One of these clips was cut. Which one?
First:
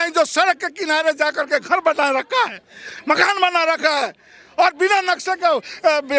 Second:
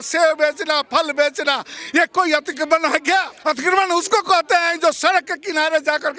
second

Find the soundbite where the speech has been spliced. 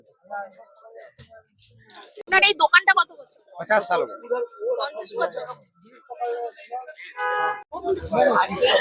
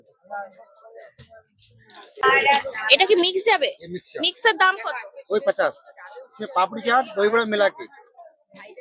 second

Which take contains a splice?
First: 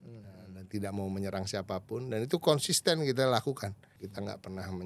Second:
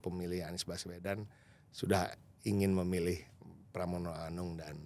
first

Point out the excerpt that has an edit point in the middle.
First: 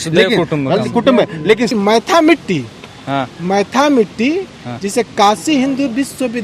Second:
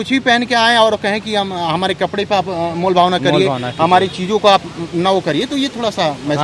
first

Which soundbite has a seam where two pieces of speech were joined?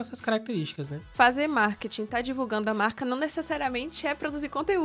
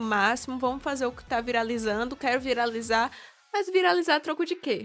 first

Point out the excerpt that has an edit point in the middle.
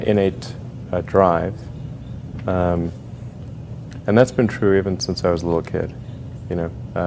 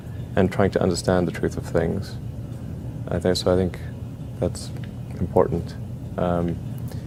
first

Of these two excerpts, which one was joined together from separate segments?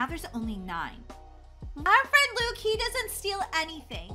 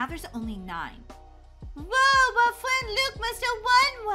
first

